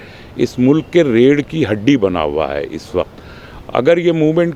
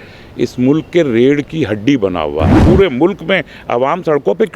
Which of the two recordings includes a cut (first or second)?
second